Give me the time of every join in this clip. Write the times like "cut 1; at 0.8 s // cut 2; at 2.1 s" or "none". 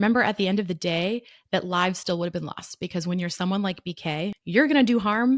cut 1; at 4.4 s